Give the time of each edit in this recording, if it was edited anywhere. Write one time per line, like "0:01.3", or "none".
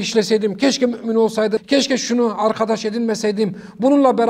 0:01.6